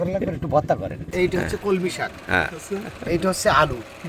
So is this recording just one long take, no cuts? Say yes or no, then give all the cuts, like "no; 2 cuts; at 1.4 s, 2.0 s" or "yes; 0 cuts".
no; 1 cut; at 1.1 s